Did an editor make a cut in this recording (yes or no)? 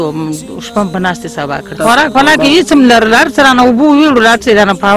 yes